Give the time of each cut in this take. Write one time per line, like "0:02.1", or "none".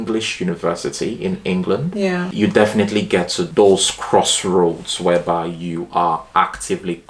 0:02.3